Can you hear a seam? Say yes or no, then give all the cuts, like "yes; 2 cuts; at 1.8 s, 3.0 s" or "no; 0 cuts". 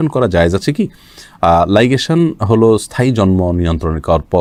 no; 0 cuts